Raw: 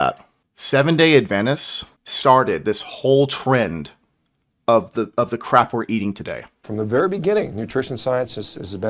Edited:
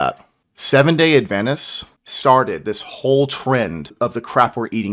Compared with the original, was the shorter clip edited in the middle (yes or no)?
yes